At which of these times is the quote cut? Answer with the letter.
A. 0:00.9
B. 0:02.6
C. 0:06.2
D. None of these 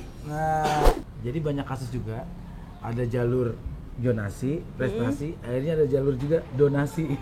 A